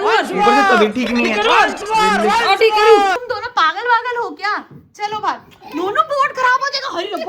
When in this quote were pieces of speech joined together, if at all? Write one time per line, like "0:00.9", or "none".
0:03.2